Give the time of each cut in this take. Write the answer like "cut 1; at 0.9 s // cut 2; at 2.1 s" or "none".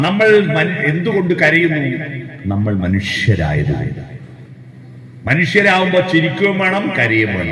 none